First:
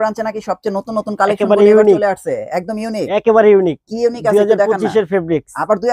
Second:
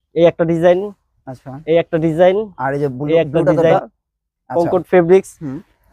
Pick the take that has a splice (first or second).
second